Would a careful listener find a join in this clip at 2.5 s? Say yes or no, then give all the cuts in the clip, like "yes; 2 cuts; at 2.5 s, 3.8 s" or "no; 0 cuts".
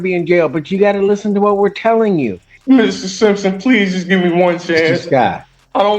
yes; 1 cut; at 2.5 s